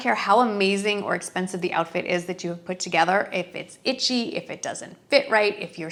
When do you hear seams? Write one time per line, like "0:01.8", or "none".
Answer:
none